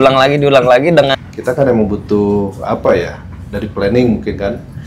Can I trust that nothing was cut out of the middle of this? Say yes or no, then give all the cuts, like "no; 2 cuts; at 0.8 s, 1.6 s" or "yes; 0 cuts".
no; 1 cut; at 1.1 s